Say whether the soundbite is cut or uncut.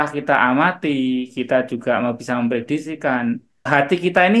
uncut